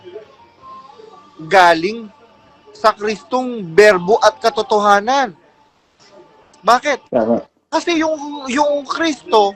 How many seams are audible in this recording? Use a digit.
0